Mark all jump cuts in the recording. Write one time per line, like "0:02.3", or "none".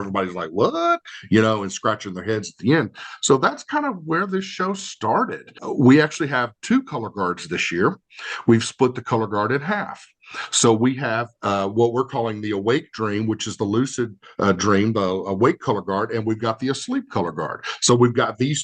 0:05.6